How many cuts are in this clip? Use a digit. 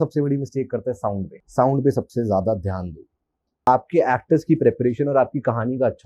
2